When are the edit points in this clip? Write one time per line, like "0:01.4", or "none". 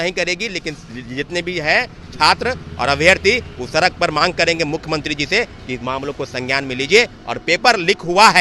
none